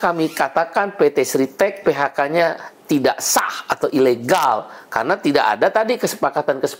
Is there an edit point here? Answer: no; 0 cuts

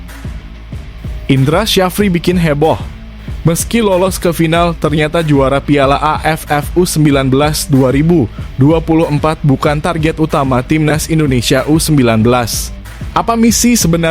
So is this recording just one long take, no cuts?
no; 1 cut; at 0.9 s

